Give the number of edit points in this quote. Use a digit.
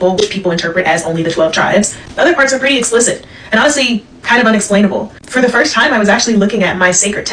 0